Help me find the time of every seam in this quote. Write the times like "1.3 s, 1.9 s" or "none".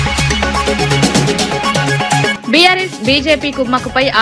2.3 s